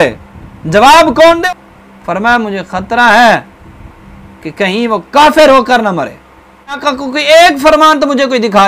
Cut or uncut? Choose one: cut